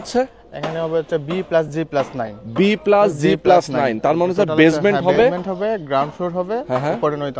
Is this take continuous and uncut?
yes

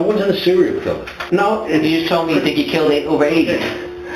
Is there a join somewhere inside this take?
yes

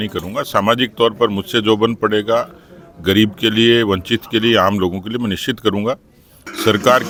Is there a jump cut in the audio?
no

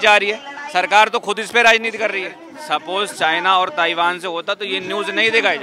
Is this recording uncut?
no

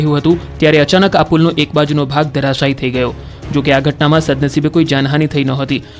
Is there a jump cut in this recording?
yes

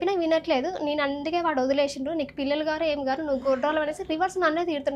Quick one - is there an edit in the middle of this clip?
no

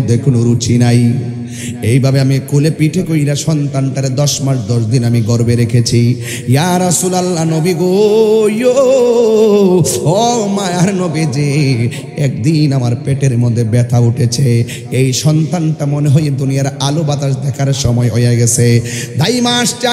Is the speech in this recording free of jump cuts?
yes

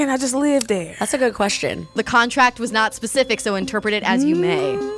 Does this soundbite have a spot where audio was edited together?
yes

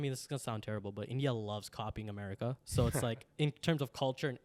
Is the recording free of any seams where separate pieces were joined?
yes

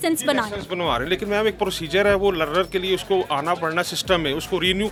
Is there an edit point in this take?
no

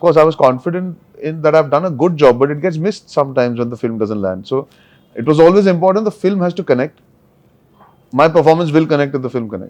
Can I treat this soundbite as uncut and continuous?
yes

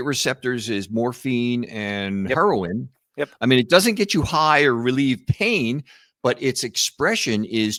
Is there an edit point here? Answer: no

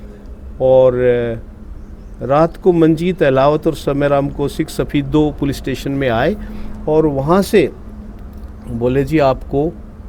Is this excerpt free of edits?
yes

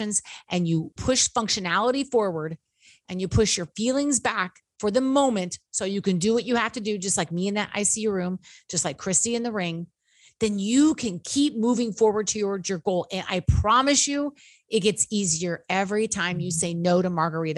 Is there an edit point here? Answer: yes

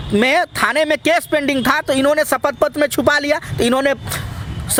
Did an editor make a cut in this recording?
no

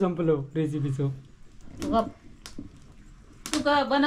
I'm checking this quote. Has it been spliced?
no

